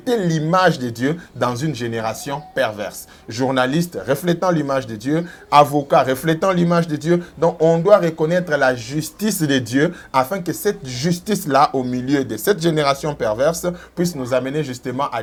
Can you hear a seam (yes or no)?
no